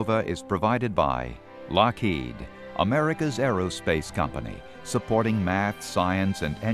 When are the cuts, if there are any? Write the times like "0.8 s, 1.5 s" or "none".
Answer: 1.6 s